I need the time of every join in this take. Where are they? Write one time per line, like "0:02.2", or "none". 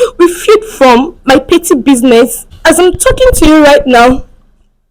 0:02.5